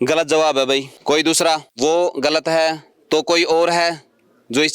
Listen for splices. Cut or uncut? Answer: cut